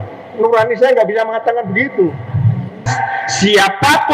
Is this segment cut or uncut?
cut